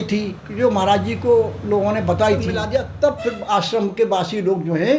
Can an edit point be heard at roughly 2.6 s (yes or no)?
yes